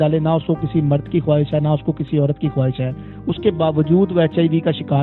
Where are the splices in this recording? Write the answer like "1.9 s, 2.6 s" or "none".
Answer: none